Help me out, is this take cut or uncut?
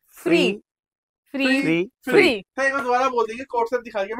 uncut